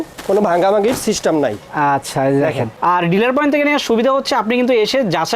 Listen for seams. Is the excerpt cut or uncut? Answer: cut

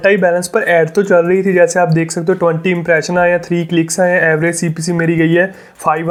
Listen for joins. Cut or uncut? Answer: uncut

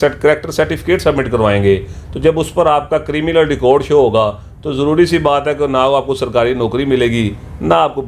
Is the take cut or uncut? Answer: uncut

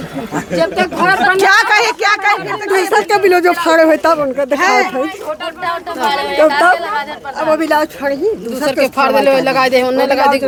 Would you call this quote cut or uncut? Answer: uncut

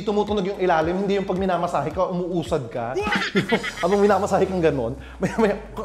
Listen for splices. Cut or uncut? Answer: uncut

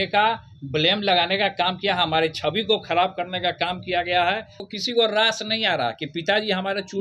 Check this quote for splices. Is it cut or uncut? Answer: cut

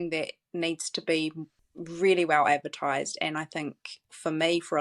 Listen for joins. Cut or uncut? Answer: uncut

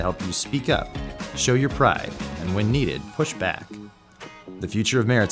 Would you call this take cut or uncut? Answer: cut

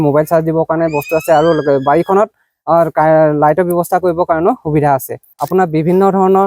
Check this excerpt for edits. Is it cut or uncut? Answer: cut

